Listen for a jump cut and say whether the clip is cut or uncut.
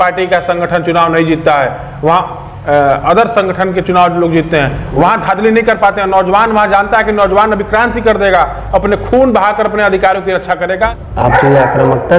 cut